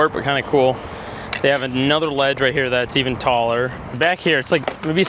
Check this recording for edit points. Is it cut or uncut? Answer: cut